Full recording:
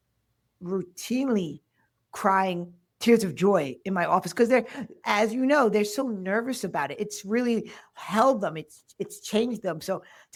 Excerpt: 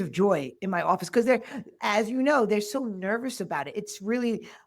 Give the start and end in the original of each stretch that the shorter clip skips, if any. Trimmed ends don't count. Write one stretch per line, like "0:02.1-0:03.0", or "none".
none